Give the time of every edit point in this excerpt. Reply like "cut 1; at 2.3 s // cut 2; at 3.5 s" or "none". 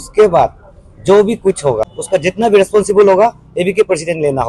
cut 1; at 1.9 s